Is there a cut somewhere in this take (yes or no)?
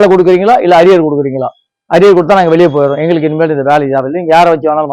no